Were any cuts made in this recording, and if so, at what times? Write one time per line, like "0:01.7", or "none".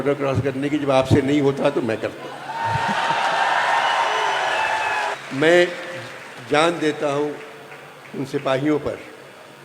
0:05.2